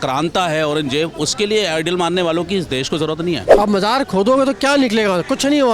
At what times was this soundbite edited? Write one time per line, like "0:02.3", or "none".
0:03.5